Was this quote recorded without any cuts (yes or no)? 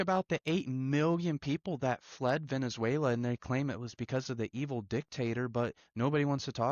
yes